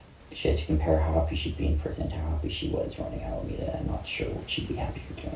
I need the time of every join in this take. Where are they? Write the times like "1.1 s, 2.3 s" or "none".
none